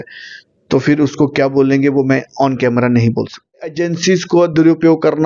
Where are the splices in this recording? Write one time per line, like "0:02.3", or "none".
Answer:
0:03.8